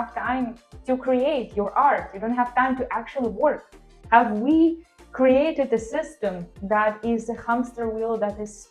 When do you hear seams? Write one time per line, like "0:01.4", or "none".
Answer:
0:03.9